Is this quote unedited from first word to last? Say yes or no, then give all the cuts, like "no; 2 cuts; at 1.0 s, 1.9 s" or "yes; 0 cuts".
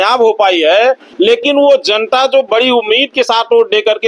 no; 1 cut; at 1.1 s